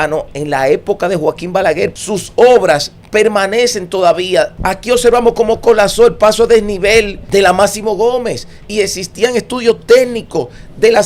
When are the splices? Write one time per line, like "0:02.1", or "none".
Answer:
0:01.9
0:04.6
0:07.2